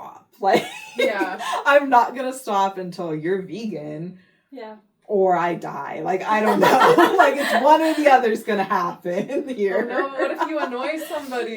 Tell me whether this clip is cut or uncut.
uncut